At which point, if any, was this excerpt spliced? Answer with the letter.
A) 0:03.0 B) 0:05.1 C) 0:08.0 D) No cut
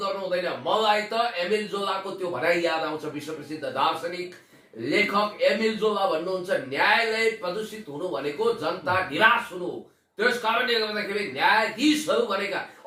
D